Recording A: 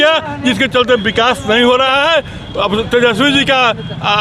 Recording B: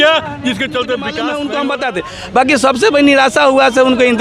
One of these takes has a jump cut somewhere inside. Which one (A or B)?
B